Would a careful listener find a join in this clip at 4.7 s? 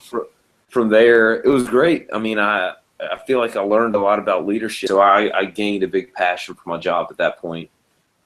no; 0 cuts

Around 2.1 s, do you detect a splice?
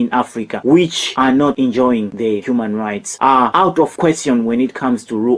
no; 0 cuts

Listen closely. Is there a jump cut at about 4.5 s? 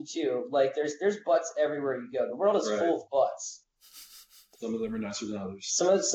yes; 1 cut; at 4.5 s

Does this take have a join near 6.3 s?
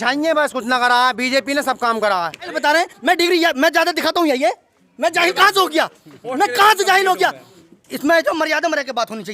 no; 1 cut; at 2.5 s

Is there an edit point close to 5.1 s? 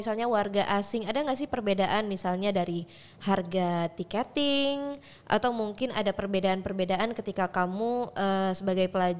no; 0 cuts

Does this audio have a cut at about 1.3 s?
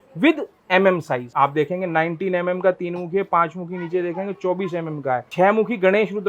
yes; 2 cuts; at 1.3 s, 5.3 s

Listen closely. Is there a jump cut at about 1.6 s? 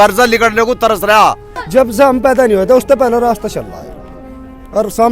yes; 1 cut; at 1.6 s

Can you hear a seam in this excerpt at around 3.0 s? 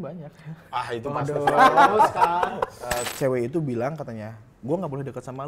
yes; 1 cut; at 3.0 s

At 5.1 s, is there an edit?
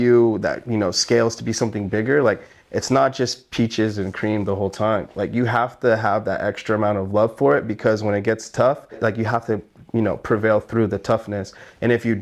no; 0 cuts

